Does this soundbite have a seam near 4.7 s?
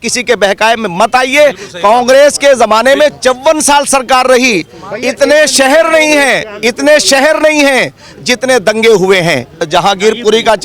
no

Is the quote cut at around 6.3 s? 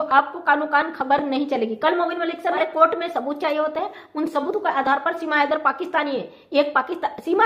no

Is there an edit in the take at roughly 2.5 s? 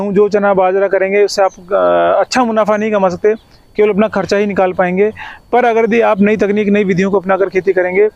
no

